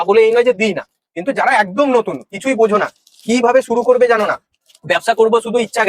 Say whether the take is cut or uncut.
uncut